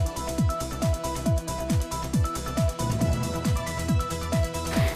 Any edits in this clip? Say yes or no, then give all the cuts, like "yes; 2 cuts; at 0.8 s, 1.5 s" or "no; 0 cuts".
no; 0 cuts